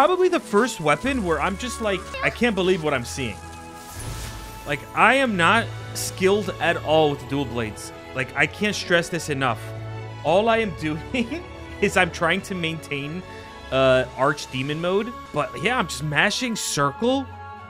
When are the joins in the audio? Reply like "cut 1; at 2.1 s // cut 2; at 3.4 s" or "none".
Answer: cut 1; at 2.1 s // cut 2; at 15.2 s